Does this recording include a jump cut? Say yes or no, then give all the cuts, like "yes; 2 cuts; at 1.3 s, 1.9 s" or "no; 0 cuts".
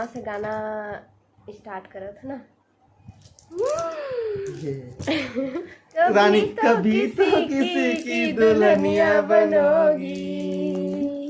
yes; 1 cut; at 5.8 s